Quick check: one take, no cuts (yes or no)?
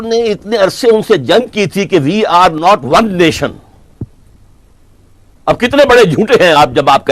yes